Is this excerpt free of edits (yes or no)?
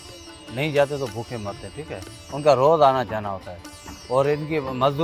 yes